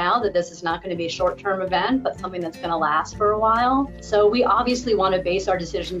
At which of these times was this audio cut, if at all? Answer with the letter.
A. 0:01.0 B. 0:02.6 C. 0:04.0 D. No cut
C